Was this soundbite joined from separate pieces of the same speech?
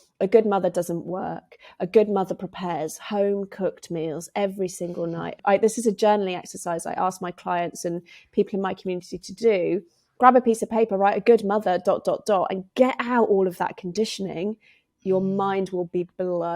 yes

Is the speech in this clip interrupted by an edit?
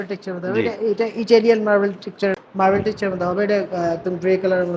yes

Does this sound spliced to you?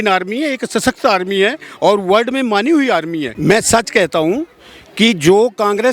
yes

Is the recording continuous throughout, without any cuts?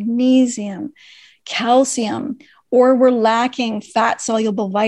yes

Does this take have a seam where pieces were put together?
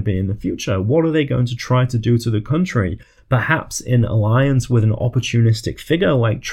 no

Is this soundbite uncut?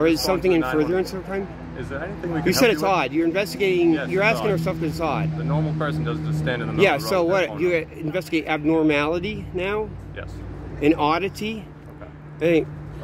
yes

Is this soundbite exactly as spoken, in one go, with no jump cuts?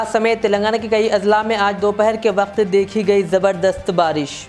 yes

